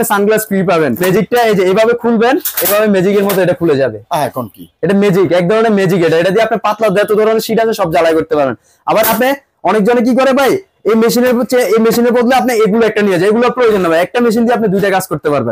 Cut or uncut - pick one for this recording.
cut